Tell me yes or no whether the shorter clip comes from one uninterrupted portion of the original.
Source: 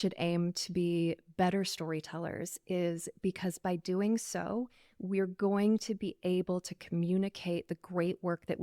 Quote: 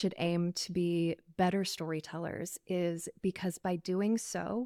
yes